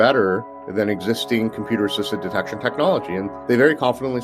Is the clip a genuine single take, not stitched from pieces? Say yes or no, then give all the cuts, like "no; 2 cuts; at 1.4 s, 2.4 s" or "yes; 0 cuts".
no; 1 cut; at 3.3 s